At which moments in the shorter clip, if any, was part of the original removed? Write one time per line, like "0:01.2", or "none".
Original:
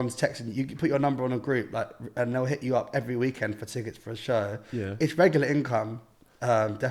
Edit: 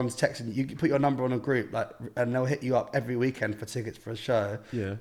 none